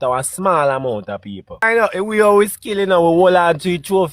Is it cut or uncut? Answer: cut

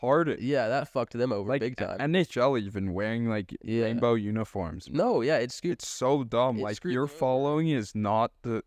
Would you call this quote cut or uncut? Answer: uncut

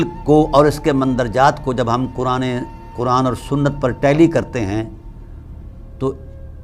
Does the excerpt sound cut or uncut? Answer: uncut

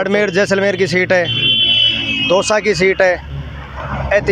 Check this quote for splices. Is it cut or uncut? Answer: uncut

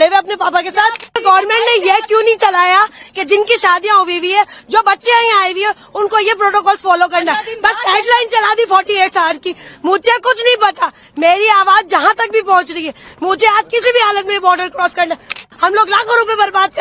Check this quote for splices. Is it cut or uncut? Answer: cut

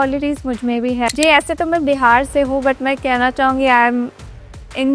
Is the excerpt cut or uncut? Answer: cut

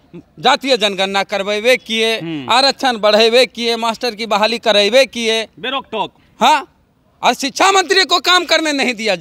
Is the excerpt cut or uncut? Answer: uncut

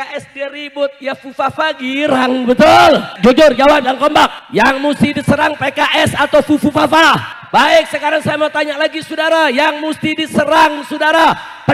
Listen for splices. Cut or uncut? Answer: cut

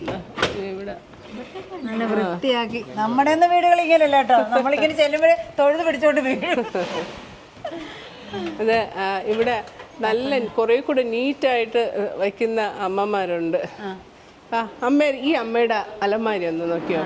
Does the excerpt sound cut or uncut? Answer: uncut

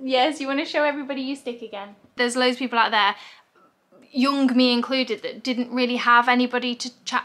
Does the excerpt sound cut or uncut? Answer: cut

